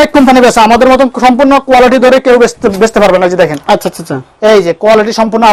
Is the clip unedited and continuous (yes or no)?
yes